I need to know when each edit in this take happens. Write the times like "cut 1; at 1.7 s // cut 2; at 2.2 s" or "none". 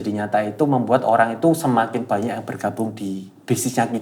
none